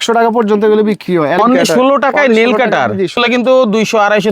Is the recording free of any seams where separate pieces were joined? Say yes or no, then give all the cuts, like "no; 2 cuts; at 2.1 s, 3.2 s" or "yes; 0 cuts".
no; 2 cuts; at 1.4 s, 3.2 s